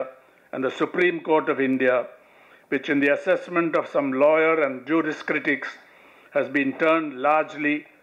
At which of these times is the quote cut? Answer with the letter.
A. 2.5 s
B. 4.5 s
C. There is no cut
C